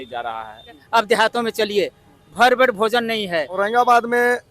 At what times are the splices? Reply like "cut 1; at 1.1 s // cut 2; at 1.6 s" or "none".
cut 1; at 0.8 s // cut 2; at 3.5 s